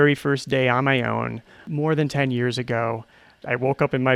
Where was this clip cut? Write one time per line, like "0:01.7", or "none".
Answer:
none